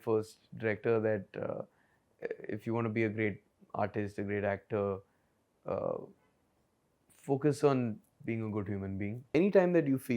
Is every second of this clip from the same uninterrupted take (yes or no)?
no